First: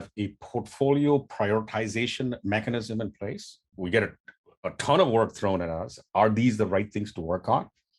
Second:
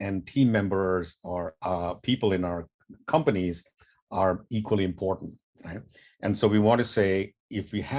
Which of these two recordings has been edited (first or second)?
first